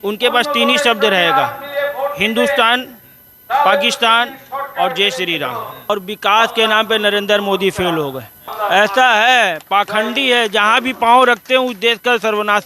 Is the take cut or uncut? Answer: cut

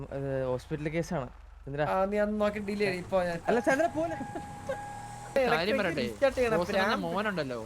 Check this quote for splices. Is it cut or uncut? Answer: cut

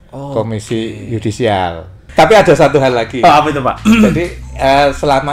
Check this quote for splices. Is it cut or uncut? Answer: cut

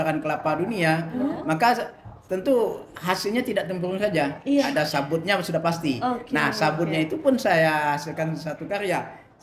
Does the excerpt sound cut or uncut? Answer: uncut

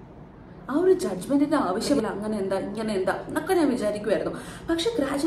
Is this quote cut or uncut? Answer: cut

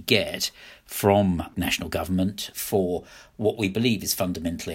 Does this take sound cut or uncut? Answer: cut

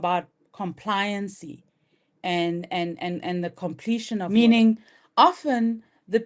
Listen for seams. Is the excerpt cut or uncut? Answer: cut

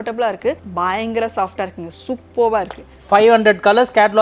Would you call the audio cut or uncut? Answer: cut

